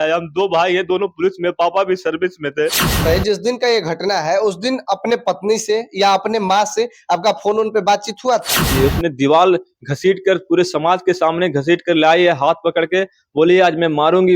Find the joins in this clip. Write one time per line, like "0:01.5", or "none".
0:03.0
0:08.7